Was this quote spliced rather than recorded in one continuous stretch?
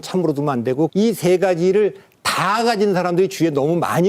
yes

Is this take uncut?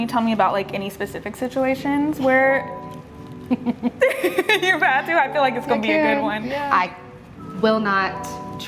no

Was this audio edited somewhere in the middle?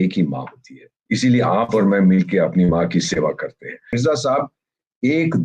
yes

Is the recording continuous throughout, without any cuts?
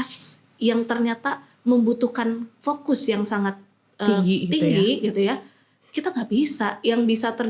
yes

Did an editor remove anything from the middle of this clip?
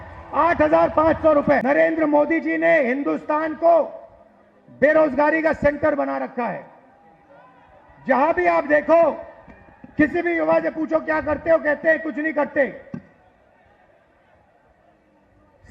yes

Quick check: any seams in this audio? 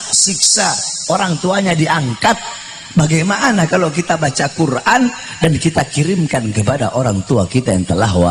no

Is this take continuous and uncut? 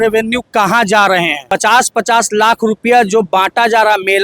no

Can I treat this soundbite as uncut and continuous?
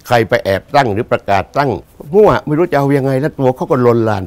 no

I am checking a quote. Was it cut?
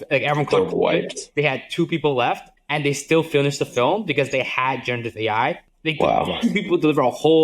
yes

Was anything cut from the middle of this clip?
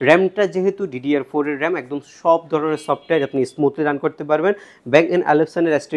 no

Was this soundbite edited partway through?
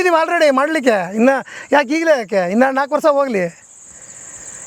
no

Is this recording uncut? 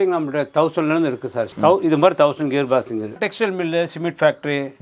no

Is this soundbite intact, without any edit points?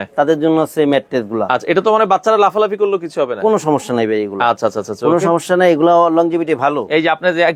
yes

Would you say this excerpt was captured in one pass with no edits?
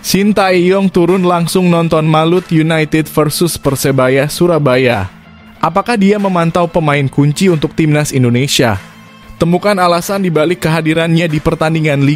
yes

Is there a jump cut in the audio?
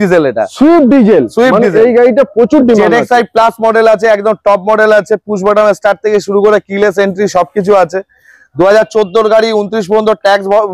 no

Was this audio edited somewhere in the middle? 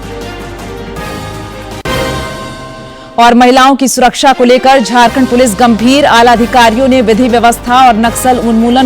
yes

